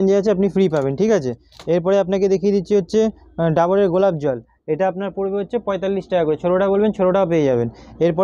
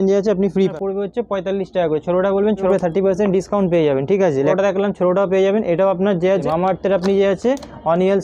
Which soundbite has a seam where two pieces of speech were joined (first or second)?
second